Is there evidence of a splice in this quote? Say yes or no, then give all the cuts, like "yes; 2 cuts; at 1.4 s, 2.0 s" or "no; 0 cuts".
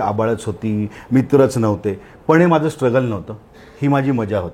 no; 0 cuts